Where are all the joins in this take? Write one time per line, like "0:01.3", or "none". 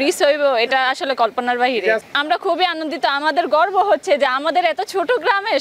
0:02.0